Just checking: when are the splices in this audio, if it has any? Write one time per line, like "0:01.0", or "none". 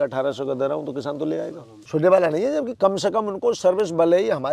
0:01.7